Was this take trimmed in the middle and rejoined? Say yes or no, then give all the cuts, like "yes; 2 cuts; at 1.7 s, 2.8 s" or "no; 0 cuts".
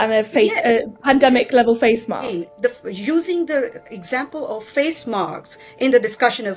yes; 1 cut; at 2.5 s